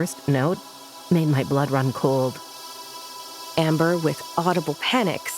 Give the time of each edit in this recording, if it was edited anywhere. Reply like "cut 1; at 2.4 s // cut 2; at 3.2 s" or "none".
cut 1; at 2.9 s